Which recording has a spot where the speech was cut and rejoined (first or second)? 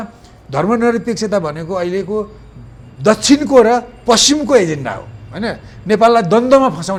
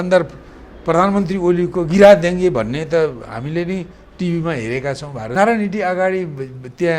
second